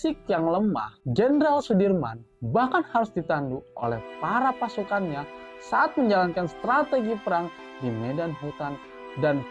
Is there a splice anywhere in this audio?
yes; 1 cut; at 1.0 s

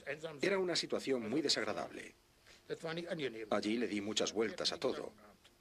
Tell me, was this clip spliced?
no; 0 cuts

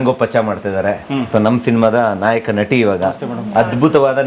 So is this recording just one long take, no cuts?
yes; 0 cuts

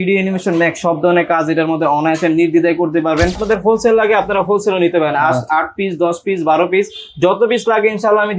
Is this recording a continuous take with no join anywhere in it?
no; 1 cut; at 3.4 s

